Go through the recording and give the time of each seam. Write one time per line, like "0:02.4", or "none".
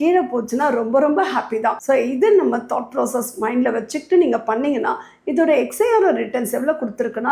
none